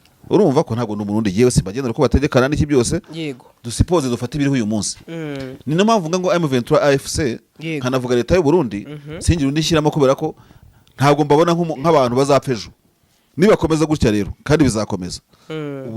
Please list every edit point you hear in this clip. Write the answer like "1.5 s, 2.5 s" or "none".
none